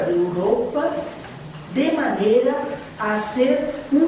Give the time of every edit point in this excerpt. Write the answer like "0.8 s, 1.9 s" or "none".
2.4 s